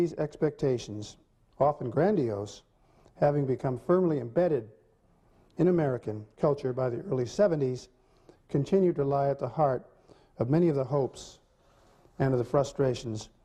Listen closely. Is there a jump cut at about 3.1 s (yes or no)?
no